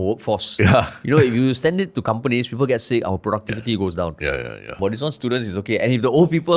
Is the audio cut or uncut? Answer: uncut